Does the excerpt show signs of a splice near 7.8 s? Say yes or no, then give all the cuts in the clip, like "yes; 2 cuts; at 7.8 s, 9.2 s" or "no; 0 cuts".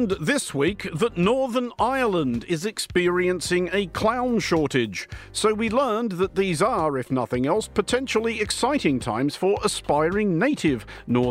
no; 1 cut; at 5.2 s